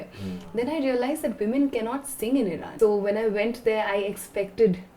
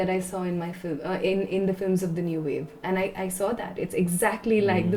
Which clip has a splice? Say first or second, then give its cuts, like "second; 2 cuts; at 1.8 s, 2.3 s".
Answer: first; 1 cut; at 2.6 s